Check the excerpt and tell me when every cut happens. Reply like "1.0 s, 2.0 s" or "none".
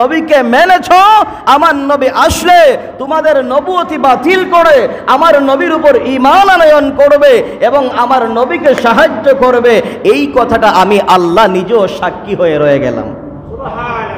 none